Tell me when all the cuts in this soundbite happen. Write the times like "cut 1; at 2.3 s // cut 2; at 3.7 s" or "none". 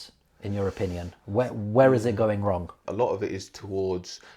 cut 1; at 2.8 s